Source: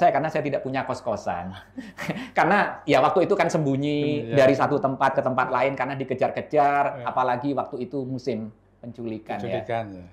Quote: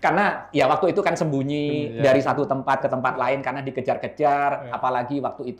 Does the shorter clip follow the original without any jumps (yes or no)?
yes